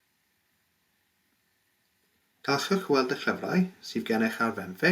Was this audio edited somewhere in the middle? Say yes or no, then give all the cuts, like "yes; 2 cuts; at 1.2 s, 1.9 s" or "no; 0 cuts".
no; 0 cuts